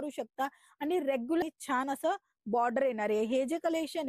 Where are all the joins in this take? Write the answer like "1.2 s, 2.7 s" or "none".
1.4 s